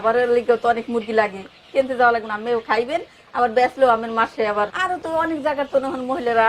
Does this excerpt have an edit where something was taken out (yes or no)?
yes